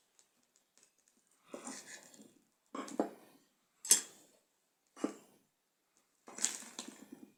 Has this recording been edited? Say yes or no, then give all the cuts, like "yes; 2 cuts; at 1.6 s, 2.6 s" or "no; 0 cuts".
no; 0 cuts